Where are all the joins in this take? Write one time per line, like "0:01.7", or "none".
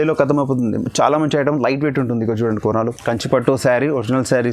0:03.0